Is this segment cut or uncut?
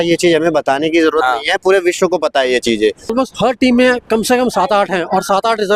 cut